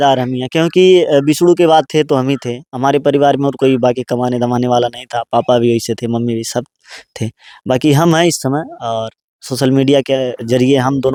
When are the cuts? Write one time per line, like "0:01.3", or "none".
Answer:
none